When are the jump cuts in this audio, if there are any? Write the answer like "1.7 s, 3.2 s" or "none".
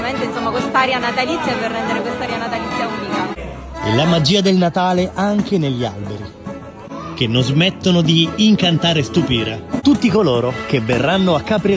6.9 s, 9.7 s